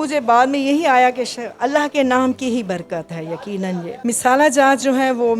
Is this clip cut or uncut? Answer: cut